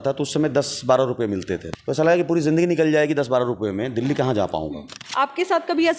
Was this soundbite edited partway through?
yes; 2 cuts; at 1.7 s, 5.0 s

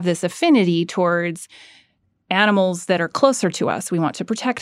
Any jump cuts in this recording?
no; 0 cuts

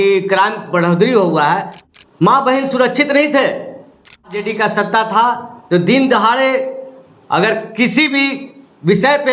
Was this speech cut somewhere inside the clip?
yes; 2 cuts; at 1.7 s, 4.4 s

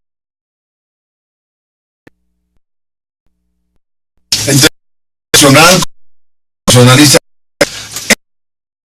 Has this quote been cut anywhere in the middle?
yes; 1 cut; at 7.4 s

